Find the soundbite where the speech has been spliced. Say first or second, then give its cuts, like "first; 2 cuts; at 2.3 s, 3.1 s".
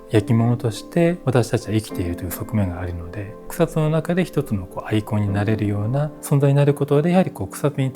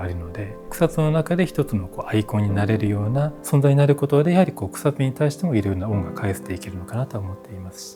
first; 1 cut; at 1.2 s